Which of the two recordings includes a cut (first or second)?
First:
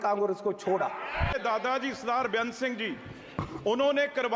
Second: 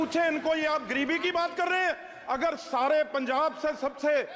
first